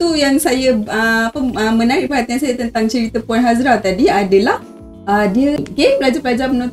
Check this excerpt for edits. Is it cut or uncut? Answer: cut